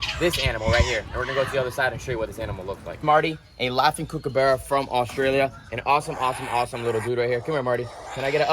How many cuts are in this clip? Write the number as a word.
one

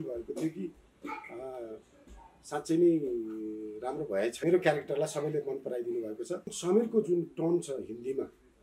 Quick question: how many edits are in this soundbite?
two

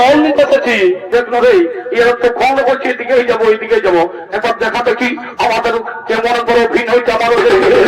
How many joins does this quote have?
one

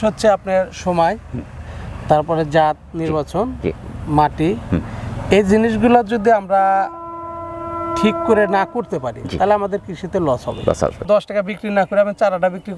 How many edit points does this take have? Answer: one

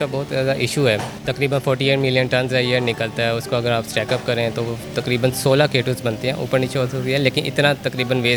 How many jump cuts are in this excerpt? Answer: zero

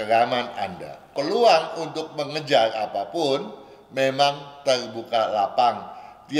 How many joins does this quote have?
one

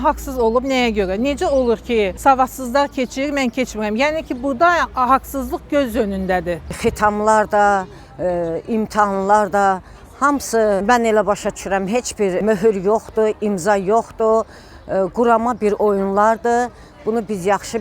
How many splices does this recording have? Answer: four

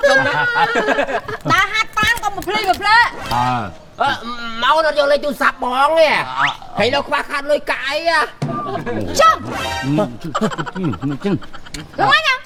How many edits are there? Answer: zero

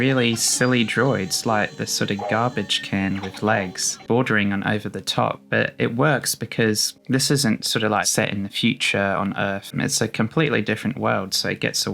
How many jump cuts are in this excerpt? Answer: three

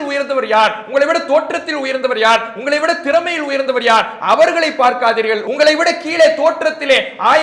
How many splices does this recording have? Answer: one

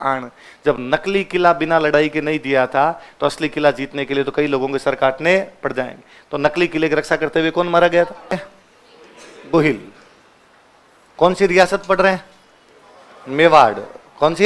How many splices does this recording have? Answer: zero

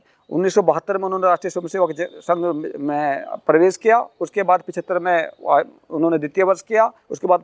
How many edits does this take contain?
zero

